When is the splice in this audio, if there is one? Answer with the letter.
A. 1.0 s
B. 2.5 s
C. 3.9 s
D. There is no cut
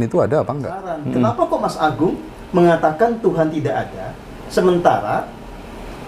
A